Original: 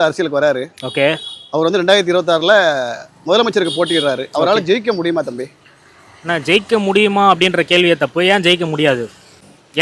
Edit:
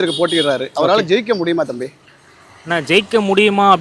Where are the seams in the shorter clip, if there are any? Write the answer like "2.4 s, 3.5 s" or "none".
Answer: none